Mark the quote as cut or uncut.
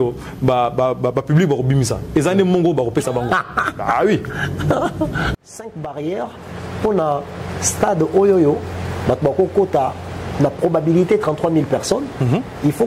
cut